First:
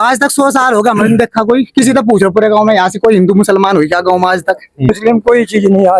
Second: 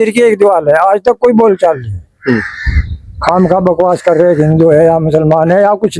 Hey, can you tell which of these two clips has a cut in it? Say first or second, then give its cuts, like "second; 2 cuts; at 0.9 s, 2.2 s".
first; 1 cut; at 4.9 s